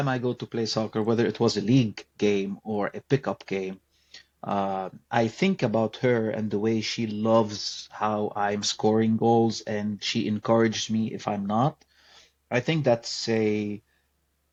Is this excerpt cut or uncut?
uncut